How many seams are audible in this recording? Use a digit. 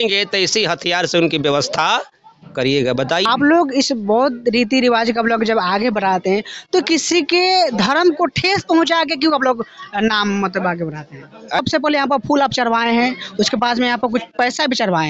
2